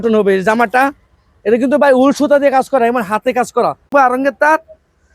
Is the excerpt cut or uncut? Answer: cut